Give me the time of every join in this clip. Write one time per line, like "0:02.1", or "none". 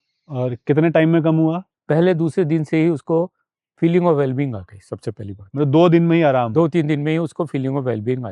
0:01.7